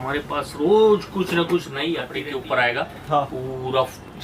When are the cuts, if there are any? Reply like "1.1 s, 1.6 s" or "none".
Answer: 2.1 s